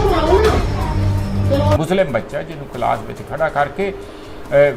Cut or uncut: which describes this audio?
cut